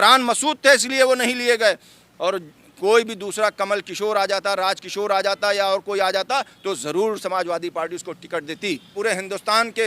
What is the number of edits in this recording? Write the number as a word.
one